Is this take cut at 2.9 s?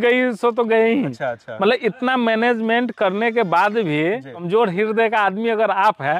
no; 2 cuts; at 1.2 s, 4.5 s

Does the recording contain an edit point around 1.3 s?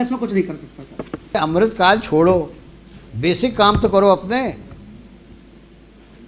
yes; 1 cut; at 1.3 s

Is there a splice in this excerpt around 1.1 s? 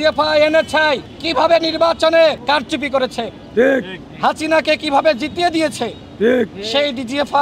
yes; 2 cuts; at 1.1 s, 2.4 s

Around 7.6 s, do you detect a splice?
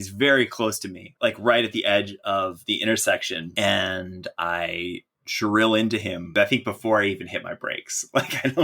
no; 3 cuts; at 1.1 s, 3.5 s, 6.3 s

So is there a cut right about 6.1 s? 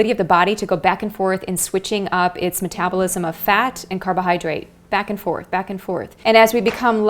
yes; 1 cut; at 6.1 s

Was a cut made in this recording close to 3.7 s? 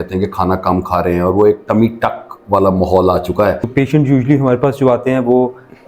yes; 1 cut; at 3.7 s

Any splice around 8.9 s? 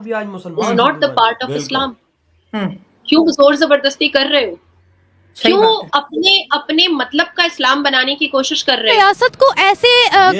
yes; 1 cut; at 8.9 s

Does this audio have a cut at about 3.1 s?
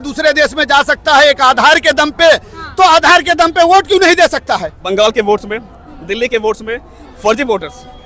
no; 1 cut; at 4.7 s

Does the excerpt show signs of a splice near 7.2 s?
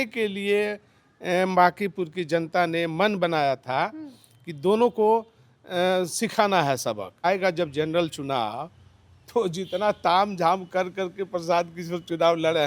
yes; 1 cut; at 7.2 s

